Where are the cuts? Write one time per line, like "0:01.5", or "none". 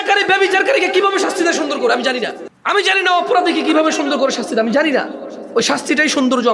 0:02.5